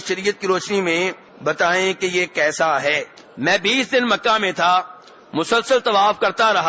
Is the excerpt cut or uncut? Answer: cut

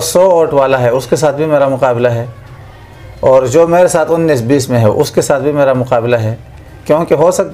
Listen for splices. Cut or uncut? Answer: uncut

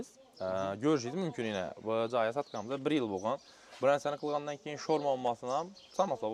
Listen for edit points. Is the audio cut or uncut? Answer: uncut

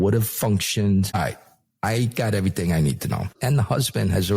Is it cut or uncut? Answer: cut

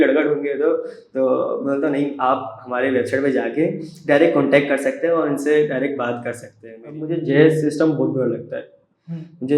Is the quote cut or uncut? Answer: cut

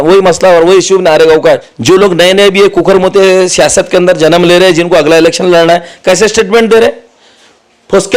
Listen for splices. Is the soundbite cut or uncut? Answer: cut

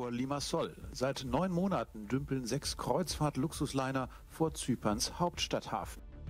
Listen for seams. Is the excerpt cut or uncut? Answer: uncut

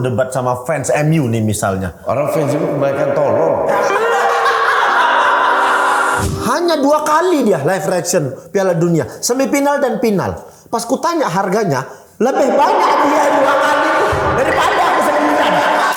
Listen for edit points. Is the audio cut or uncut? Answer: cut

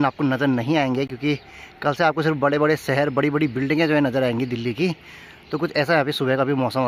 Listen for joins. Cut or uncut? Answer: uncut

